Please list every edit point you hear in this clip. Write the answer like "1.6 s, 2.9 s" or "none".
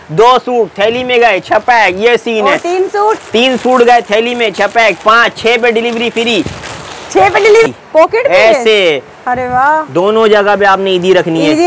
7.7 s